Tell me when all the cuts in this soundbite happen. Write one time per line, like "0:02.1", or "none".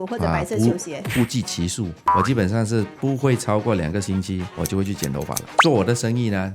0:02.0
0:04.5